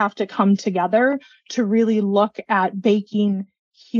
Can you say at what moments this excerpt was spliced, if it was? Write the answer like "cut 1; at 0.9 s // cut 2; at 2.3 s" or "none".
none